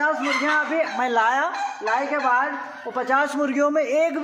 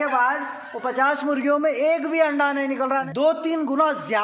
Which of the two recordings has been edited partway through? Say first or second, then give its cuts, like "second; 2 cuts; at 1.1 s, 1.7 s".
second; 1 cut; at 3.1 s